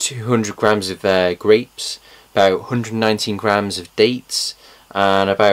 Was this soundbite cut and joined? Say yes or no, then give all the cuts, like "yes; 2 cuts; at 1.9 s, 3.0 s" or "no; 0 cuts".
yes; 1 cut; at 1.8 s